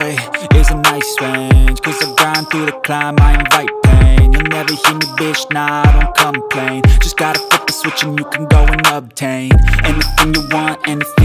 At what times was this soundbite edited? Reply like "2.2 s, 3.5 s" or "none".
6.6 s